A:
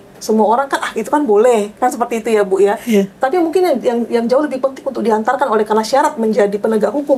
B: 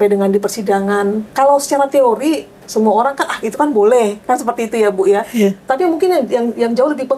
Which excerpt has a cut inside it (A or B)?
B